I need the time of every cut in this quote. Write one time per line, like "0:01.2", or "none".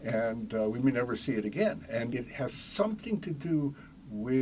0:02.1